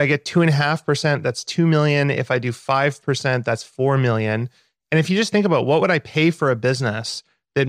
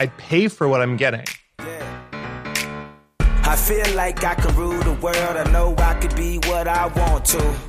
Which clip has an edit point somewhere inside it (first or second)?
second